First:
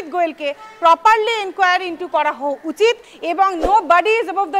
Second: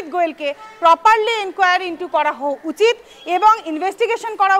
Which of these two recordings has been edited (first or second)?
first